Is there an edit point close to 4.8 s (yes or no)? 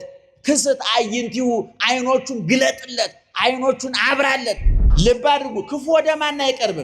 yes